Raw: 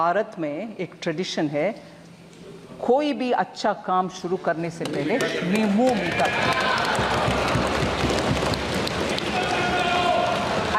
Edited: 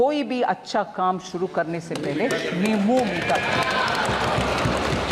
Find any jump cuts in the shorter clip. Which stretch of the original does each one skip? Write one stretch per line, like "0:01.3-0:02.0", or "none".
none